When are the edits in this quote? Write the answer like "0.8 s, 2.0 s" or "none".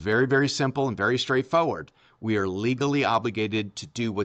none